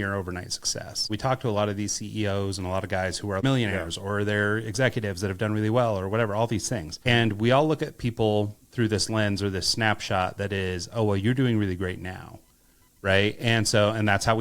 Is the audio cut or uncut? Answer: cut